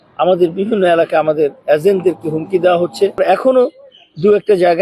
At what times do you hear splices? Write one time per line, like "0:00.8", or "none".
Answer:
0:03.2